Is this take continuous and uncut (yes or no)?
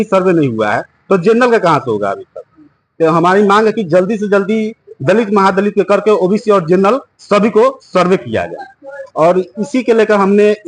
yes